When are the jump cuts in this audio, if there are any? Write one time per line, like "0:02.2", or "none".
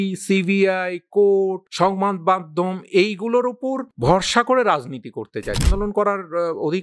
0:01.6
0:03.9
0:05.7

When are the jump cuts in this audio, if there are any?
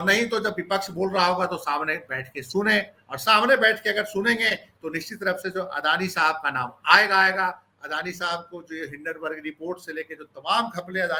none

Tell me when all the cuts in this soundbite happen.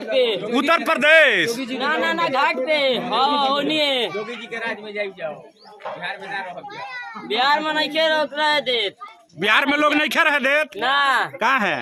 none

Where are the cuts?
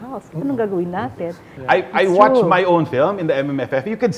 0:01.5

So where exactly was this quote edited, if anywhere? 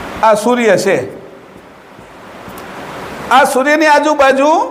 none

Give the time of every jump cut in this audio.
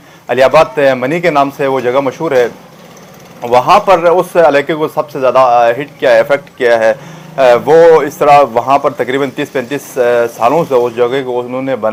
none

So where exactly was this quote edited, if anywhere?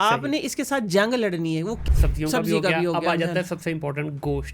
0:01.8

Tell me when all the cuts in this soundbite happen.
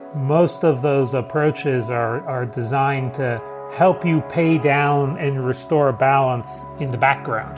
0:06.6

